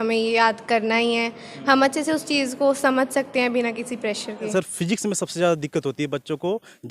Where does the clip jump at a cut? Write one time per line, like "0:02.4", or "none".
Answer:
0:04.5